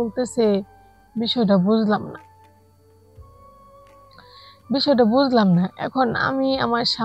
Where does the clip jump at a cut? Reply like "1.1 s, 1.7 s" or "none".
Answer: none

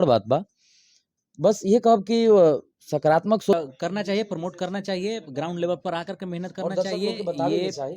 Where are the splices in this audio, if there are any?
3.5 s

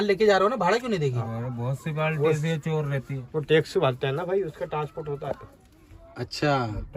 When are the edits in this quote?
none

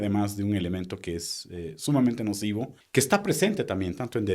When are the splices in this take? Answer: 2.8 s

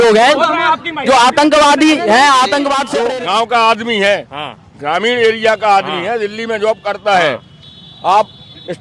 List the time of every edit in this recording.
2.9 s

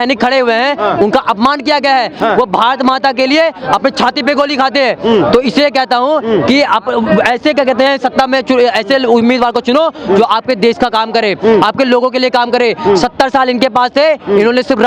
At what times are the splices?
none

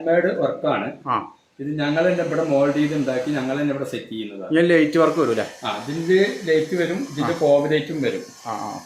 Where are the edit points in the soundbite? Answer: none

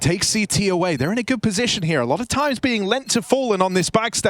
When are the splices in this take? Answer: 1.1 s

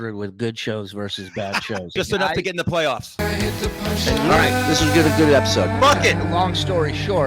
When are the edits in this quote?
1.9 s, 3.1 s

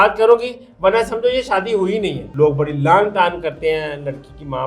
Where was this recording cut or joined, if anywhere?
2.2 s

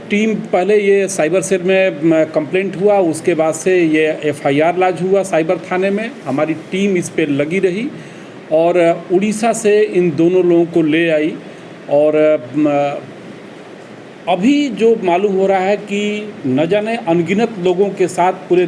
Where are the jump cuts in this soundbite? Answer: none

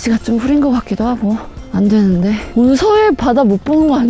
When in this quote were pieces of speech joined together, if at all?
1.6 s, 2.5 s

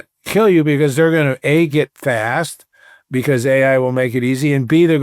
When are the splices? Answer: none

